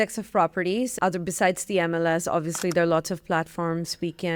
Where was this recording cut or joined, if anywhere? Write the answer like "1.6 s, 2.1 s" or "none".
0.9 s

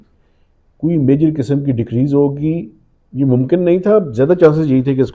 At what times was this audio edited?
none

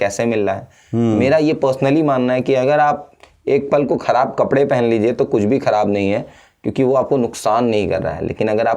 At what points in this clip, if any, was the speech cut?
none

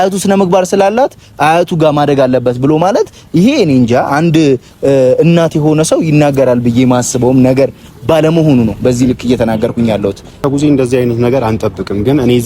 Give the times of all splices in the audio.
10.4 s

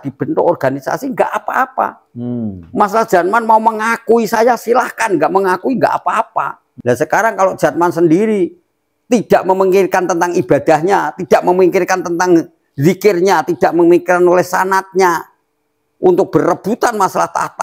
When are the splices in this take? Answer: 6.6 s

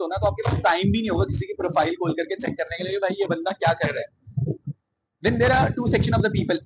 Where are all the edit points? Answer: none

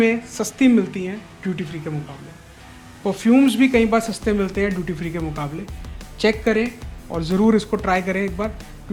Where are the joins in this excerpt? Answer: none

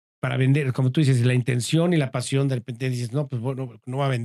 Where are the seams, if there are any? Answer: none

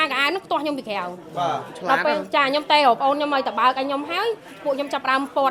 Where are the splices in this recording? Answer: none

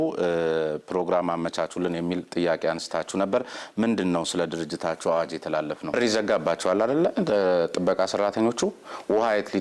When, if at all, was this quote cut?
6.0 s

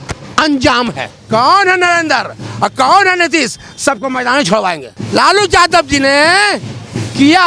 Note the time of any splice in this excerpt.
1.1 s, 4.9 s

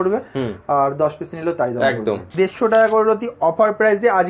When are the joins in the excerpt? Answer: 2.3 s

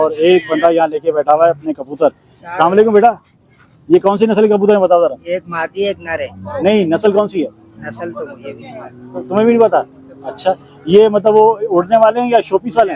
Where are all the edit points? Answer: none

